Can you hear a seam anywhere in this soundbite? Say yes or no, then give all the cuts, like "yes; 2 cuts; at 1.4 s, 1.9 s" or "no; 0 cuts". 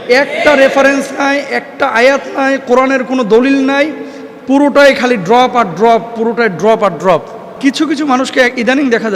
yes; 1 cut; at 7.6 s